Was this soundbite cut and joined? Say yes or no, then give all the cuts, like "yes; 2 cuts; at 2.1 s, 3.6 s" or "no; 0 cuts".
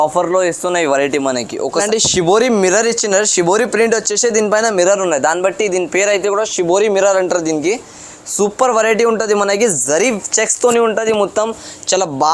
yes; 1 cut; at 1.8 s